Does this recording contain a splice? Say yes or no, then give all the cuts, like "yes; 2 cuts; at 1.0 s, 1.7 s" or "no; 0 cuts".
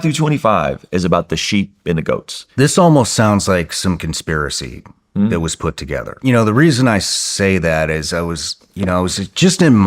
yes; 2 cuts; at 2.4 s, 6.2 s